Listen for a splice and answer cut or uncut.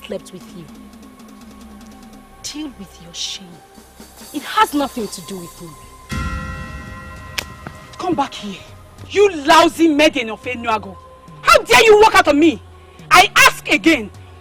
uncut